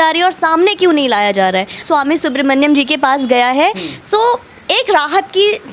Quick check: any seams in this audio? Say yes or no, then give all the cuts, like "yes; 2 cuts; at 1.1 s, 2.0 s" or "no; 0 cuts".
yes; 1 cut; at 1.8 s